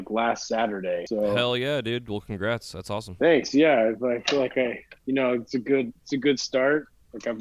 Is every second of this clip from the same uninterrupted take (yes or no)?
no